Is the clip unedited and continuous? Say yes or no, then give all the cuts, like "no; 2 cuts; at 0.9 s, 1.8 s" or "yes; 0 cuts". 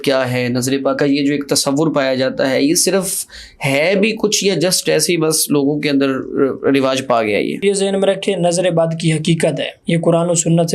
no; 3 cuts; at 1.0 s, 7.6 s, 9.7 s